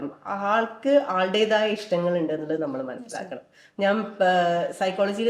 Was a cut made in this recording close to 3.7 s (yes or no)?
no